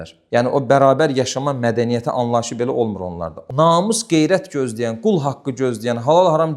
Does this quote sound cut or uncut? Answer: cut